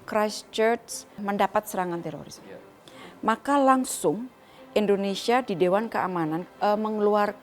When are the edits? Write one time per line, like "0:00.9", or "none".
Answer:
0:01.2
0:06.4